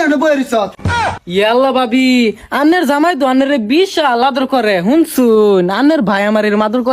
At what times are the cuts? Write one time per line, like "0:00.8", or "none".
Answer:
none